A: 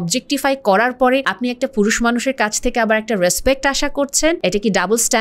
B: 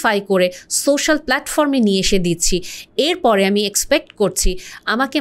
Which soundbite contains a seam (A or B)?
A